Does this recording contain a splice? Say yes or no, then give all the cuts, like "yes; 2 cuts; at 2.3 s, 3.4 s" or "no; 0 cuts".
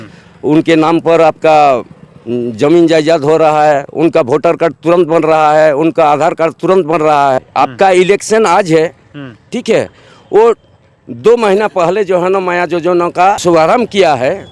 yes; 2 cuts; at 7.4 s, 13.4 s